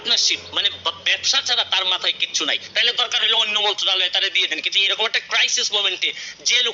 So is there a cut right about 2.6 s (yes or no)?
yes